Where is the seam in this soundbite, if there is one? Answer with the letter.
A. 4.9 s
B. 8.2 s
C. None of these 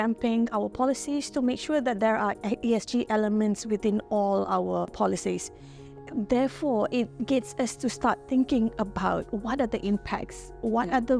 A